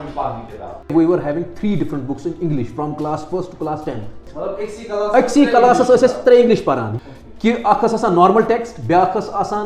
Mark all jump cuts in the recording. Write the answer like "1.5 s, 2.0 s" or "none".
0.9 s, 4.3 s, 6.9 s